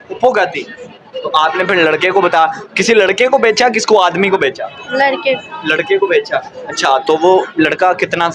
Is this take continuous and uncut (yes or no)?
yes